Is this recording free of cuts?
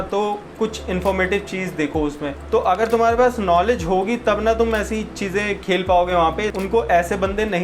no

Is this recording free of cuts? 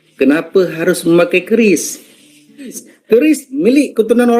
no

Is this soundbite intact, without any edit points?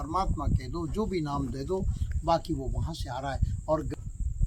yes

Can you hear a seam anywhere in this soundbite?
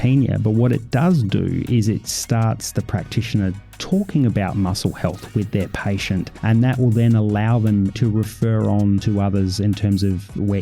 yes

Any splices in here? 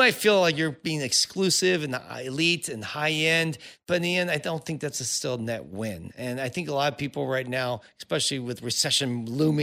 no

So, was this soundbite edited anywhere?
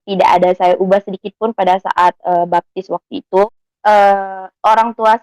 yes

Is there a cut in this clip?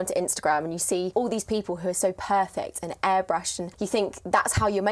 yes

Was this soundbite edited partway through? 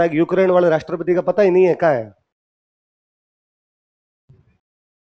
no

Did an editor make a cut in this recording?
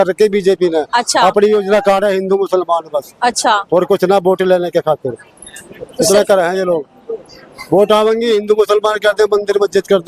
no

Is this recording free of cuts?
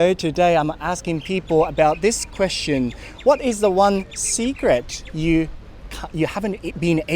yes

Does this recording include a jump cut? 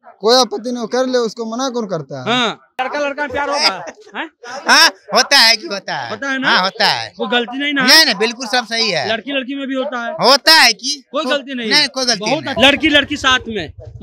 yes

